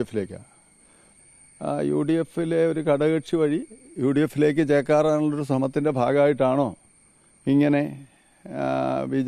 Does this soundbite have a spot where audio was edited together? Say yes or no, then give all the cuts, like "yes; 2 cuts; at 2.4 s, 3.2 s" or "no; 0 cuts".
yes; 1 cut; at 1.0 s